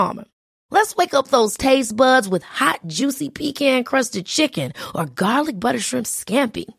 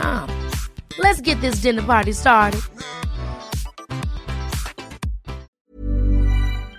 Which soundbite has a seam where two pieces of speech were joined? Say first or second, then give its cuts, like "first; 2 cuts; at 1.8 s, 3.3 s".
second; 1 cut; at 5.5 s